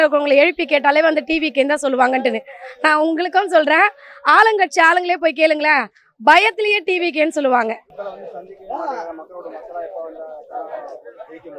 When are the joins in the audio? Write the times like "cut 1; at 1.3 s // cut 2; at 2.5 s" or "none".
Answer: none